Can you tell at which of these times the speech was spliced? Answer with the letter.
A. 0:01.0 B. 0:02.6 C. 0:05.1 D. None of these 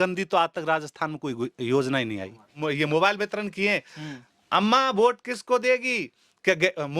B